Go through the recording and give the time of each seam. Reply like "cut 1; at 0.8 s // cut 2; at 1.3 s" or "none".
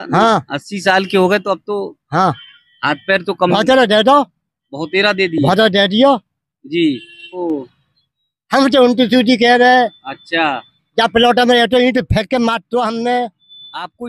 cut 1; at 7.4 s